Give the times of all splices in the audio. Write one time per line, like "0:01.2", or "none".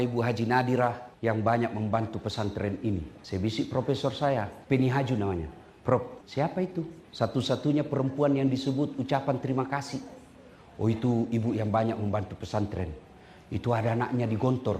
0:01.1
0:03.1
0:04.6
0:06.2
0:07.0